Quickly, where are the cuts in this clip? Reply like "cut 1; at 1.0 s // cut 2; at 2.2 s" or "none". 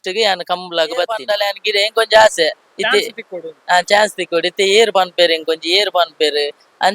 cut 1; at 1.3 s